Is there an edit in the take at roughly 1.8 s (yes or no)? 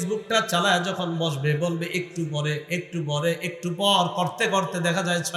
no